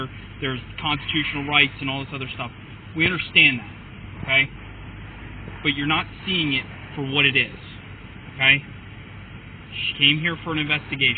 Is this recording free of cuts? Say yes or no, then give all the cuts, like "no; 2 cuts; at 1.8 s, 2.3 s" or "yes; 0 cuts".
yes; 0 cuts